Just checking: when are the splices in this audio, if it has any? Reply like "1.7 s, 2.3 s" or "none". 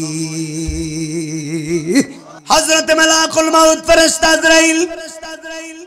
2.3 s